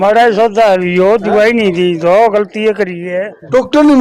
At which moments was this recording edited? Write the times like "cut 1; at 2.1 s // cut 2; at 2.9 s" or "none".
none